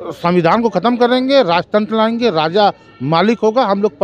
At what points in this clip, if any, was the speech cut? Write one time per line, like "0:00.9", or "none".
none